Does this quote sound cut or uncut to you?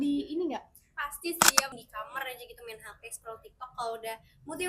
cut